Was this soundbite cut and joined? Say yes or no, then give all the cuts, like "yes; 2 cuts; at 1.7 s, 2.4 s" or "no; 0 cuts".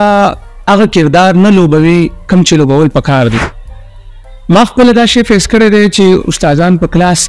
yes; 1 cut; at 3.8 s